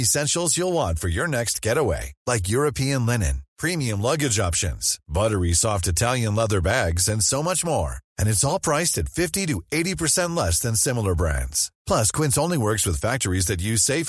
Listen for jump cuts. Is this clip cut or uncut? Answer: uncut